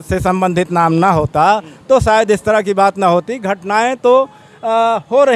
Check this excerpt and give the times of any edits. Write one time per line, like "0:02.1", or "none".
none